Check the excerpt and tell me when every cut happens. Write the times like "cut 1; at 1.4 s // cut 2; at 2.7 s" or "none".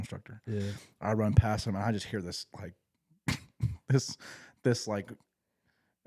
none